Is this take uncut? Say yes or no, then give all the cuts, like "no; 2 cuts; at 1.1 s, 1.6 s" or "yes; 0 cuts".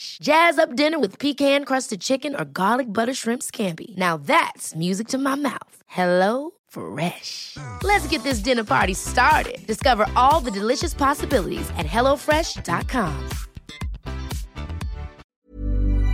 no; 1 cut; at 15.2 s